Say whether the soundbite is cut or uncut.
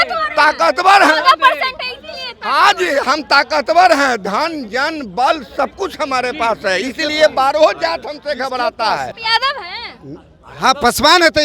cut